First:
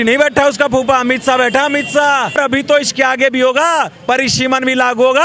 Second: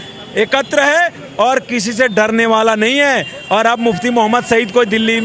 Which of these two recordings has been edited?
first; 1 cut; at 2.4 s

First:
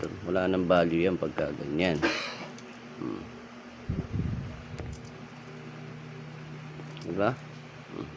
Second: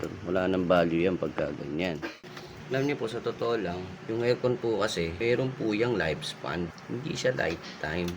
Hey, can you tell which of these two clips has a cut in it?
second; 4 cuts; at 2.1 s, 3.9 s, 5.1 s, 6.8 s

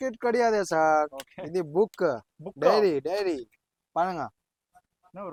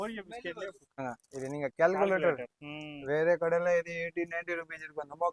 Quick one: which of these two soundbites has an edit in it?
second; 1 cut; at 1.0 s

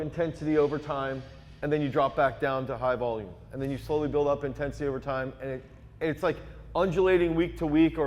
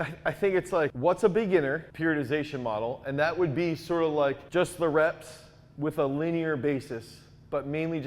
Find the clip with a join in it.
second; 3 cuts; at 0.9 s, 1.9 s, 4.4 s

